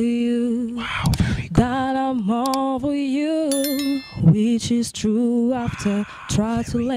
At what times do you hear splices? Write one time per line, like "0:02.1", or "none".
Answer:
none

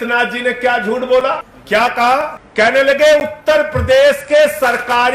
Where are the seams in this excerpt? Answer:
0:01.5
0:02.4

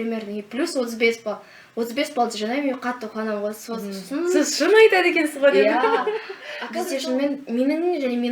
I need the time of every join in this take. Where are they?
0:06.2

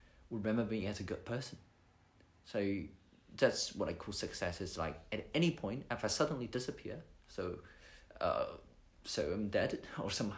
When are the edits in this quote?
none

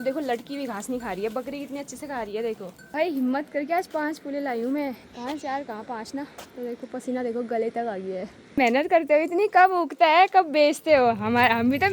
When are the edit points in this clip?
0:02.9
0:05.0
0:08.6

